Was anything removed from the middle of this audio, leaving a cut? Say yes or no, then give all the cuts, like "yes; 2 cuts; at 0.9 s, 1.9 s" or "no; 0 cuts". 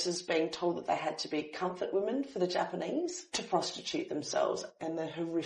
yes; 2 cuts; at 3.2 s, 4.6 s